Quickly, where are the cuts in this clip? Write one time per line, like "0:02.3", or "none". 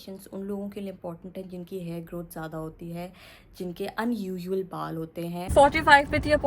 0:05.5